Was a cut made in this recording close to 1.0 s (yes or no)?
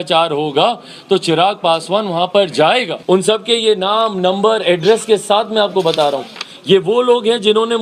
no